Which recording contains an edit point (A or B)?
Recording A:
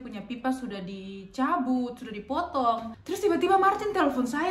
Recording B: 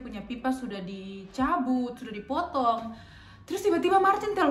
A